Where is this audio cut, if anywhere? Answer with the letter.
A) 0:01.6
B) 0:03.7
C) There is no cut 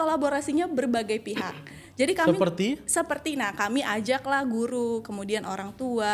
C